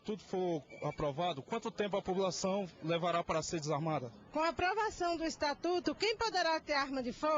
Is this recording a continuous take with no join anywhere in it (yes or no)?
no